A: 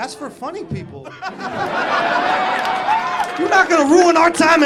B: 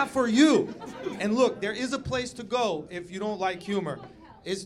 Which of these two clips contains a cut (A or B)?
B